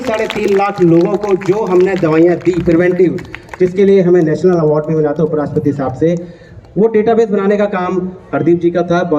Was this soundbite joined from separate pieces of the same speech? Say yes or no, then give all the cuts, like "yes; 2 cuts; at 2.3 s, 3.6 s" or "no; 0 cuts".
no; 0 cuts